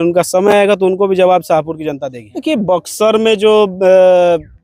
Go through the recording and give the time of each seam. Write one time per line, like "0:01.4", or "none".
none